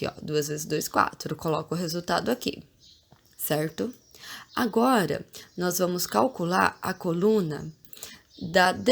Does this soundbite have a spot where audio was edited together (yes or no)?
yes